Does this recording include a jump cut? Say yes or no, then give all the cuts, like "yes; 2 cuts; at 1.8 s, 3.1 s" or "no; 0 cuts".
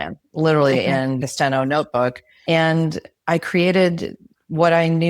yes; 2 cuts; at 1.2 s, 2.3 s